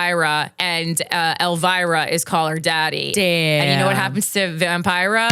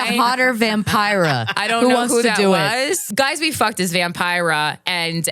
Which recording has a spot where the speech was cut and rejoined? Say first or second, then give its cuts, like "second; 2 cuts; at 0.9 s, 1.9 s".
second; 1 cut; at 3.1 s